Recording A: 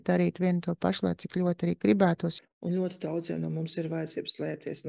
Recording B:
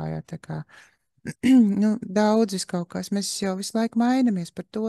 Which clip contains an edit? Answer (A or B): A